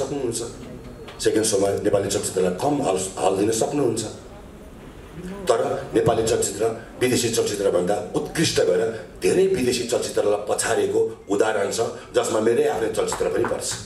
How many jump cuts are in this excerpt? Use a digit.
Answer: 0